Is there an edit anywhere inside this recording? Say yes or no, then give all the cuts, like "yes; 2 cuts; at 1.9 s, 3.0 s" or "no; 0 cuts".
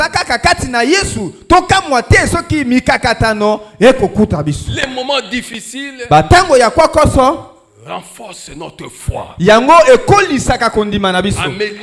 no; 0 cuts